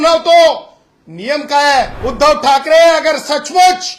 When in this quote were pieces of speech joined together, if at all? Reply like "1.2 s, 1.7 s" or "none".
2.0 s